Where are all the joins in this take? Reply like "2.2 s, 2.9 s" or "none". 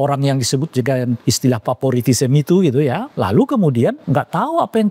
1.2 s, 3.1 s, 4.0 s

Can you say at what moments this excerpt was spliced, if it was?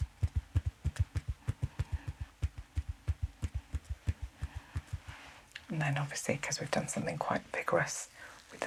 none

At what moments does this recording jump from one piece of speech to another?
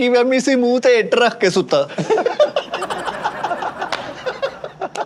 none

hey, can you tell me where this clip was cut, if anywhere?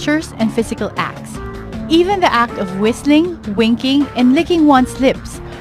none

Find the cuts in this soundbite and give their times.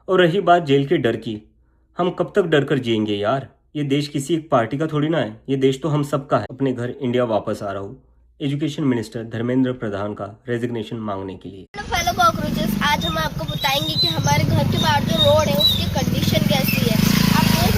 6.5 s, 11.7 s

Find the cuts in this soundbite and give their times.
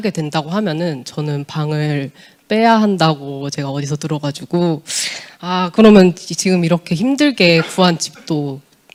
none

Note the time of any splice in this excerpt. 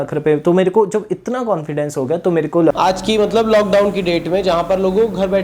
2.7 s

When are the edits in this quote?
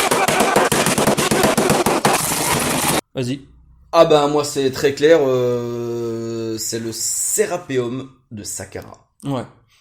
3.1 s

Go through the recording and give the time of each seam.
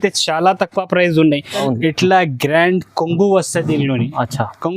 1.6 s

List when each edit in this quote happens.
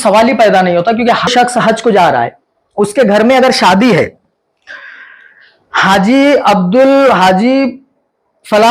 1.3 s

